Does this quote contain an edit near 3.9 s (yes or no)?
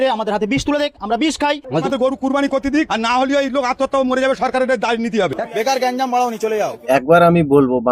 no